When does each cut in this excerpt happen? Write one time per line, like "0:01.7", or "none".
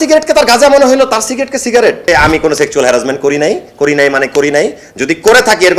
0:02.1